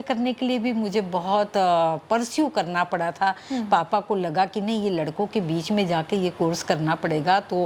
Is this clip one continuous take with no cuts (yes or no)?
yes